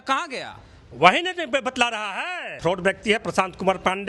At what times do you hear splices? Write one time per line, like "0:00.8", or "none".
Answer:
0:02.5